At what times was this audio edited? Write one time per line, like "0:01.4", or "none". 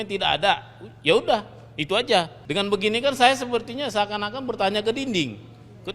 0:02.4